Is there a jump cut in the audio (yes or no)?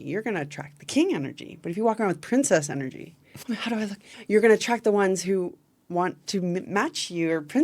no